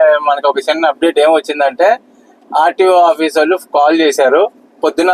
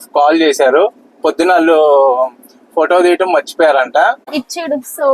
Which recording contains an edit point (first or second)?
second